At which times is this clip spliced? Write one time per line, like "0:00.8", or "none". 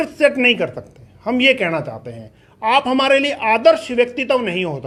none